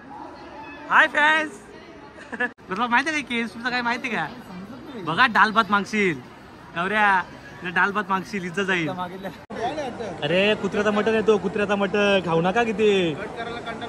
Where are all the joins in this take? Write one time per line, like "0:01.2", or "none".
0:02.5
0:09.5